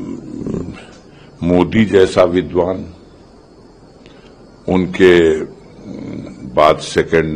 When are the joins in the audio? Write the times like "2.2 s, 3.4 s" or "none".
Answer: none